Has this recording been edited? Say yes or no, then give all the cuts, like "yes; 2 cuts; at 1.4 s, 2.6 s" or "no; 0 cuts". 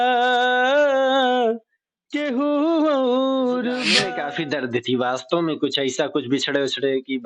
yes; 1 cut; at 4.0 s